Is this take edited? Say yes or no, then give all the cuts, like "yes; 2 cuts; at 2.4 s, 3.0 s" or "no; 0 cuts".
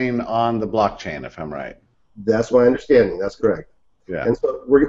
yes; 1 cut; at 1.3 s